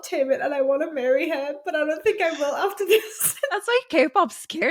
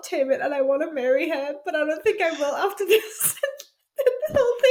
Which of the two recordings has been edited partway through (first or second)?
first